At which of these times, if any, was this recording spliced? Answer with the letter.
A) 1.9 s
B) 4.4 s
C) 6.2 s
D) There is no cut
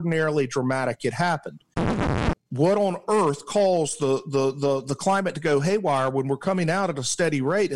A